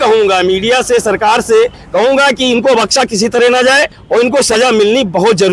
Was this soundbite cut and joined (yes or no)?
yes